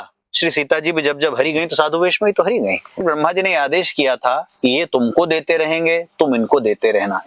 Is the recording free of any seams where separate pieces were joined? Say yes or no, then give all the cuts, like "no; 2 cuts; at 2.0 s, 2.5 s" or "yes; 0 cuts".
no; 1 cut; at 3.0 s